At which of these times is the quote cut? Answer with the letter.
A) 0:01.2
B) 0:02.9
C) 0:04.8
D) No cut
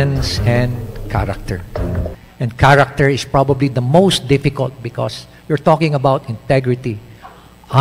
D